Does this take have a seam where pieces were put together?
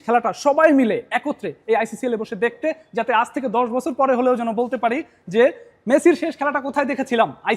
no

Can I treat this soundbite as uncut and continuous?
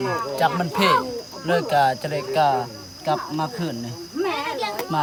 yes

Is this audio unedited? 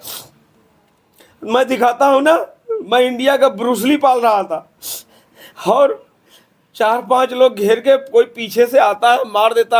yes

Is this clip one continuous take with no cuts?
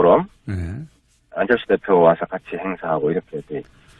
yes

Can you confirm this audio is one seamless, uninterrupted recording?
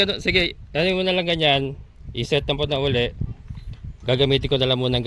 yes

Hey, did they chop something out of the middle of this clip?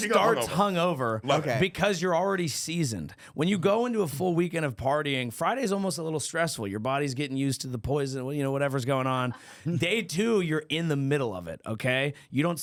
no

